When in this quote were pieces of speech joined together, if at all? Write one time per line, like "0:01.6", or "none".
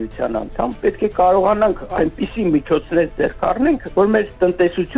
none